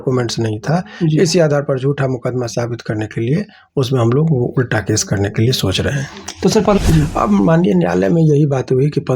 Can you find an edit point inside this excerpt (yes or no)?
yes